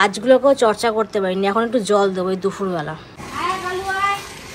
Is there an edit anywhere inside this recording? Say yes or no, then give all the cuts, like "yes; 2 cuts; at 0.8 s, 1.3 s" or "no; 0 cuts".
yes; 1 cut; at 3.1 s